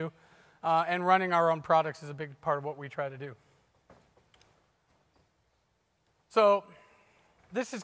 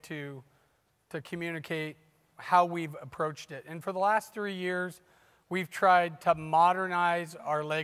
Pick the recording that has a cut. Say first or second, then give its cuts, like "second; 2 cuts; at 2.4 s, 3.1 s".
first; 1 cut; at 3.9 s